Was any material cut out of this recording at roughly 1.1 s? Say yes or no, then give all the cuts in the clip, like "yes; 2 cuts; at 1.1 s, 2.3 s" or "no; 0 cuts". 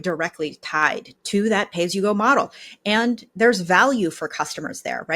yes; 1 cut; at 1.1 s